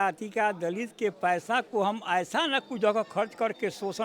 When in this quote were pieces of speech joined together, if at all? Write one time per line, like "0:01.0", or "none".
none

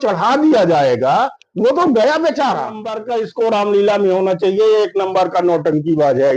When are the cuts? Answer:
0:02.9

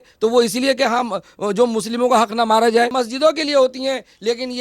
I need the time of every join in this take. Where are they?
0:02.9

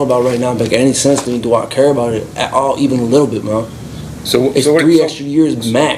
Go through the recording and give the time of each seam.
none

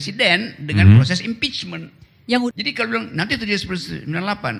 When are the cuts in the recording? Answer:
0:02.5

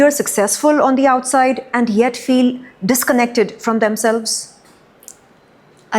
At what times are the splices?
none

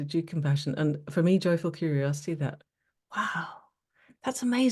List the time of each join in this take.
none

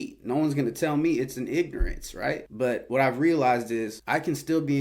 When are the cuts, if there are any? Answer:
0:02.5
0:04.0

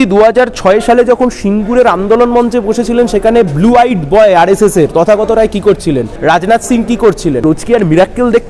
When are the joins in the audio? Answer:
0:06.1
0:07.4

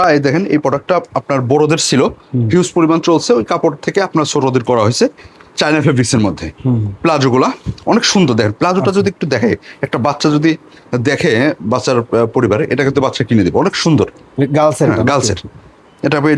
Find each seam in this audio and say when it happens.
none

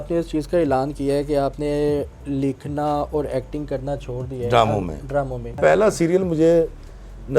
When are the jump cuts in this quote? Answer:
0:05.5

